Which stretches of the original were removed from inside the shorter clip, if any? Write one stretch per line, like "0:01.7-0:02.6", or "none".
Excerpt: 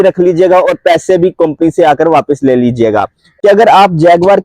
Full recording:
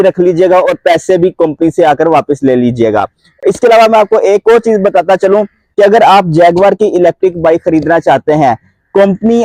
0:03.2-0:05.6